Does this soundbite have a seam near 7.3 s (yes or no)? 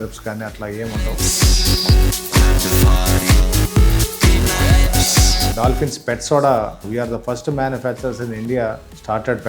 no